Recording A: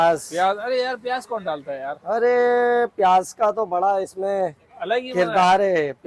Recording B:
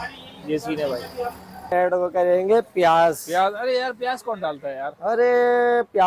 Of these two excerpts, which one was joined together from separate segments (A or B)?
B